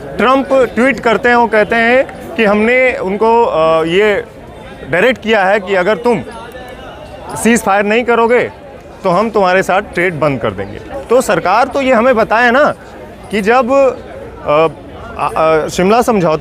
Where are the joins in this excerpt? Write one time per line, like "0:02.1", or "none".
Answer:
none